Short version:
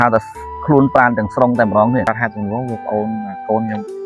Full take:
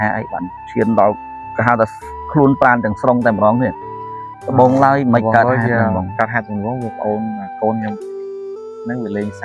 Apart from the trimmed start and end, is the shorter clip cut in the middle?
yes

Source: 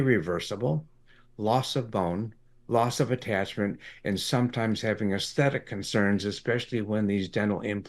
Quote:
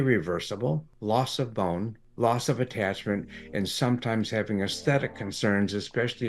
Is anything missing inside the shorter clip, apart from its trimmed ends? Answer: yes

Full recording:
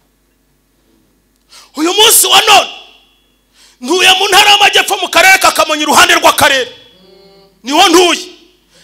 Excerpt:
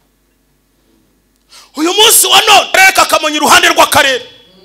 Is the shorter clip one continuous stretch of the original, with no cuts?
no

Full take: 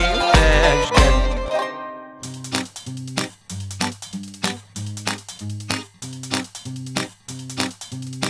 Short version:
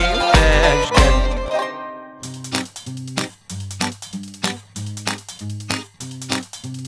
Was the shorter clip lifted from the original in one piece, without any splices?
no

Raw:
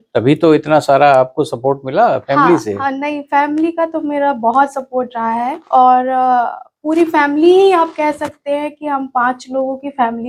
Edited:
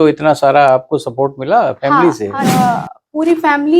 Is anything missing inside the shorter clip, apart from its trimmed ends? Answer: yes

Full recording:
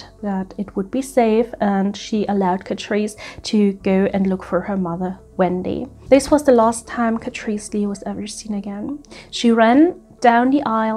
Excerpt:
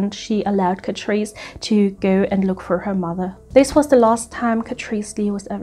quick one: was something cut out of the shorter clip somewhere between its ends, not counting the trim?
yes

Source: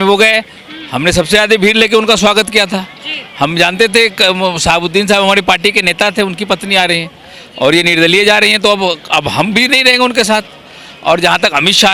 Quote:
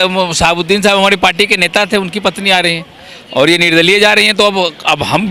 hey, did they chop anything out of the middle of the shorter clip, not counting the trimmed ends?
no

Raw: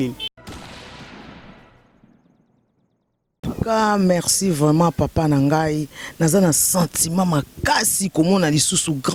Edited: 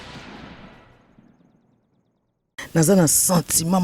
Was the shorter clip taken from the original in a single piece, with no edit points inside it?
no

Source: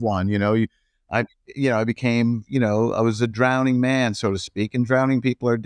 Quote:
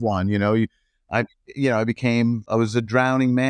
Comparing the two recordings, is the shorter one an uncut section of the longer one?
no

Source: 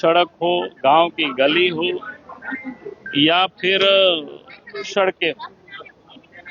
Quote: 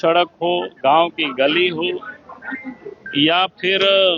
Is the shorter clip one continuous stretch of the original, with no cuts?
yes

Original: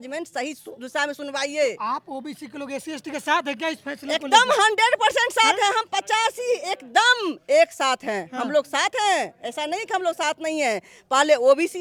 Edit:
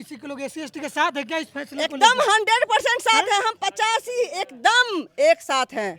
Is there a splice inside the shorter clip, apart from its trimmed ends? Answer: no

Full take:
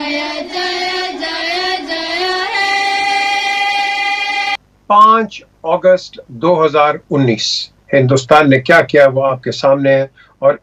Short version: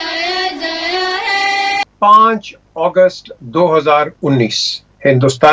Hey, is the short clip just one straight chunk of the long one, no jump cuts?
no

